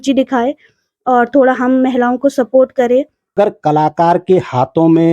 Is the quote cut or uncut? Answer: cut